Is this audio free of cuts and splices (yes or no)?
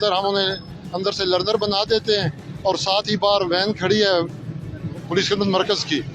yes